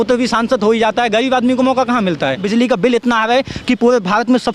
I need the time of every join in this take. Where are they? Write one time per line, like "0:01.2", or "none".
0:02.4